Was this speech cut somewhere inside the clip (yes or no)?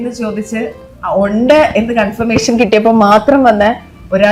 no